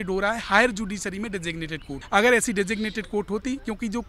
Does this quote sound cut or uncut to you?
cut